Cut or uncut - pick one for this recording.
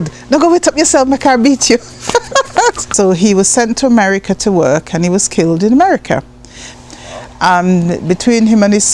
cut